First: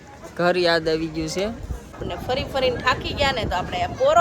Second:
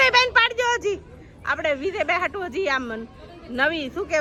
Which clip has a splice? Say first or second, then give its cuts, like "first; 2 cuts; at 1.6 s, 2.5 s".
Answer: first; 1 cut; at 2.0 s